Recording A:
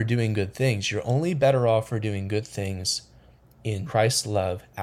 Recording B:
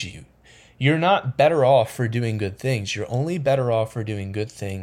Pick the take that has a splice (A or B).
A